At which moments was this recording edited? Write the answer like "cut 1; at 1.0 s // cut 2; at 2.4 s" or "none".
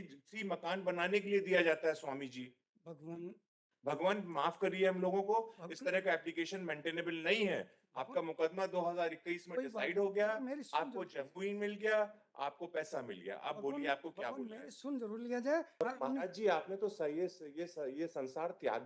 cut 1; at 15.8 s